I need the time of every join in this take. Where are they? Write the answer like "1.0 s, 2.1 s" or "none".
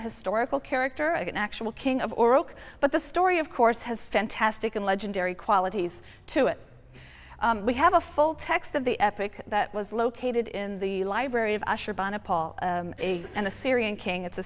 5.4 s